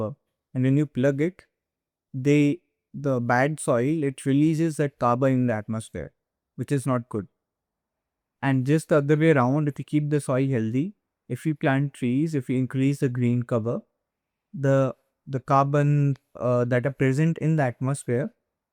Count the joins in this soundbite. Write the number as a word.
zero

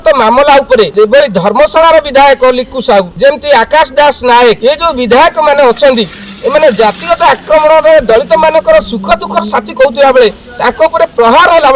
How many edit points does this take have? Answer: two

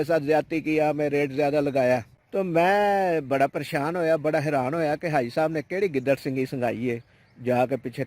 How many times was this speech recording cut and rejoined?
one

